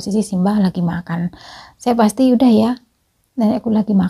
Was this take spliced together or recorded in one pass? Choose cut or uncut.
uncut